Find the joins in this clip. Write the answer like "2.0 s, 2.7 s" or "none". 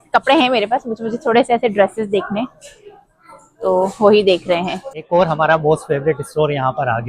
4.8 s